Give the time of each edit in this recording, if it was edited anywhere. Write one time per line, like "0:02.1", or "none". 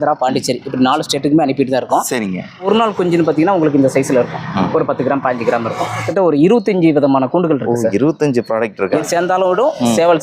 0:02.7
0:06.1
0:09.1